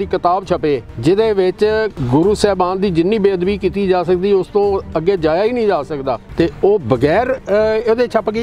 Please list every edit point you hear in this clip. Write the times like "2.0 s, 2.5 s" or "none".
0.9 s, 2.0 s, 6.3 s